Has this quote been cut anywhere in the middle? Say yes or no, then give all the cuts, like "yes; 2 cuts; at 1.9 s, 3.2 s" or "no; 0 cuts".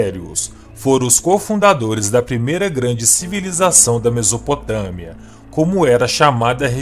no; 0 cuts